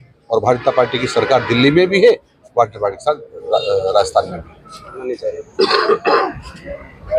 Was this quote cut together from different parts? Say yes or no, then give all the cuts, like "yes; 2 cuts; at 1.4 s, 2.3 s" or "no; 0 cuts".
yes; 1 cut; at 5.0 s